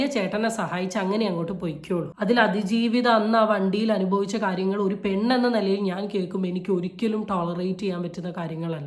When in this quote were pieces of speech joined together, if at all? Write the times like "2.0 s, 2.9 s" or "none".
2.1 s